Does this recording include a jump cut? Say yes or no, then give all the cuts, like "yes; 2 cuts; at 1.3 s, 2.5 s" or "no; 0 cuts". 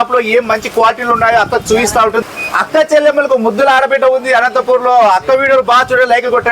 yes; 1 cut; at 2.3 s